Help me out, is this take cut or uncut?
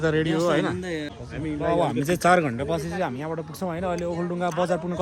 cut